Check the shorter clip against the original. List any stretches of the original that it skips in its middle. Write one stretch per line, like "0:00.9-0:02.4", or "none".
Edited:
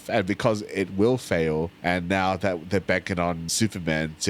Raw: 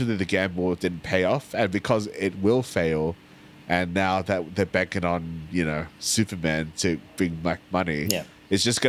0:03.2-0:03.6
0:05.3-0:06.0

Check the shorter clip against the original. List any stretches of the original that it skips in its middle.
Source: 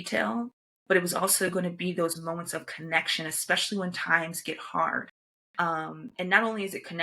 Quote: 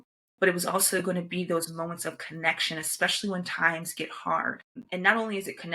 0:05.2-0:06.0

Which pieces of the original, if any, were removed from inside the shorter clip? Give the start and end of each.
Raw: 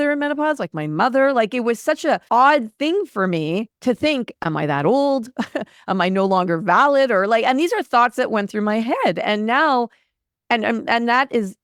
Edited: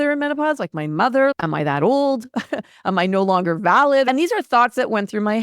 0:01.3-0:04.4
0:07.1-0:07.5

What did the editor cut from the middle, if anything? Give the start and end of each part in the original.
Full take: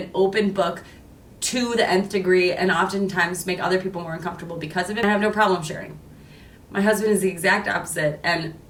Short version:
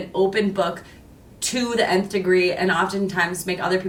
none

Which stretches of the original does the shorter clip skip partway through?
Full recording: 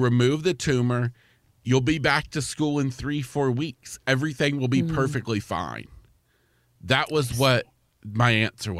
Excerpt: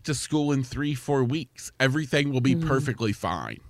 none

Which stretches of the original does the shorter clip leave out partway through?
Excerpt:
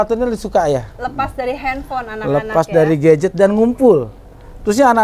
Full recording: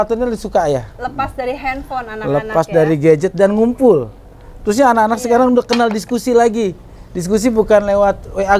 none

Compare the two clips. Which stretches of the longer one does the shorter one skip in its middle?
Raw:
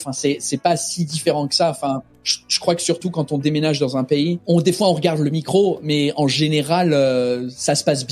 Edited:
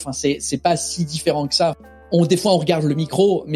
0:02.0-0:04.4

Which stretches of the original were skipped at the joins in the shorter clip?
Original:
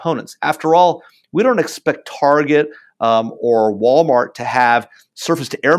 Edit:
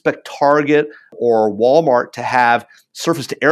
0:02.9-0:03.3

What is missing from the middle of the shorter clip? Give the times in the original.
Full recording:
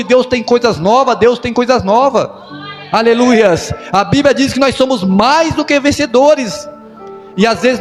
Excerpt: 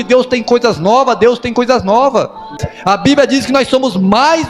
0:02.7-0:03.7

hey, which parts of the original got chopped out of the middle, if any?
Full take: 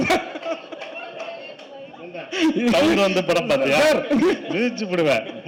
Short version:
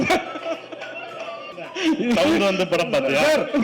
0:01.5-0:02.1

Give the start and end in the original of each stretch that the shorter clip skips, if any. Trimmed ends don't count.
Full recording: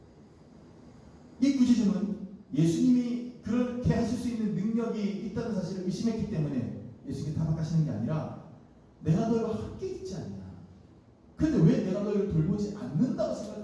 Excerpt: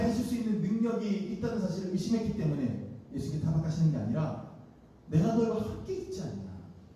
none

